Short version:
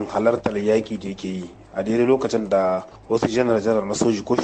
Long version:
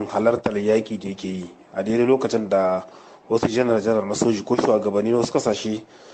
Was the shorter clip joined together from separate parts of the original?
yes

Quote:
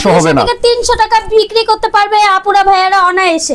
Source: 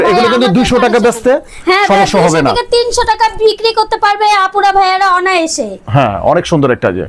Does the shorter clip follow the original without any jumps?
yes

